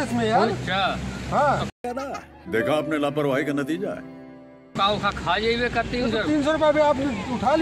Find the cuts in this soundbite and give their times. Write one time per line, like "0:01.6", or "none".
none